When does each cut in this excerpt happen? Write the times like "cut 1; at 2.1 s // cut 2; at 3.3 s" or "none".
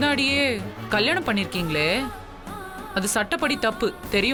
none